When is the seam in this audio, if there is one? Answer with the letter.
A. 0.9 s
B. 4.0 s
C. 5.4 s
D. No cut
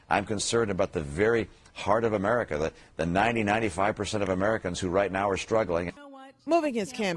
B